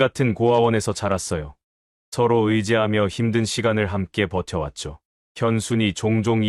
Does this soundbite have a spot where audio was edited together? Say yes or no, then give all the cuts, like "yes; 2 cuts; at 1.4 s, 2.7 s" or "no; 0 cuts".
no; 0 cuts